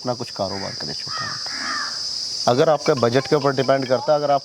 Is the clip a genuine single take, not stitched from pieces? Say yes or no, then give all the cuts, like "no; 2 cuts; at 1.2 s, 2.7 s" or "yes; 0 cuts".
yes; 0 cuts